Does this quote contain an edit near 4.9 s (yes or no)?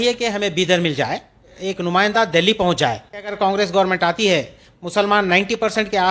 no